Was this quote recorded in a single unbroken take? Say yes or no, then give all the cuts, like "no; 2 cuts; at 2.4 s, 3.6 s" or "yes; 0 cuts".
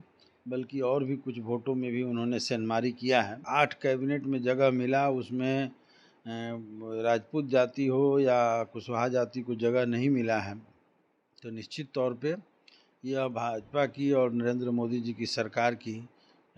no; 1 cut; at 3.4 s